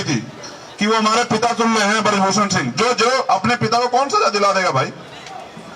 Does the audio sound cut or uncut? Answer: uncut